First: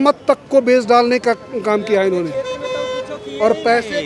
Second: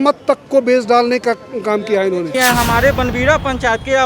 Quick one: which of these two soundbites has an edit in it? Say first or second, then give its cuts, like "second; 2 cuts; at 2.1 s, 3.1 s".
second; 1 cut; at 2.3 s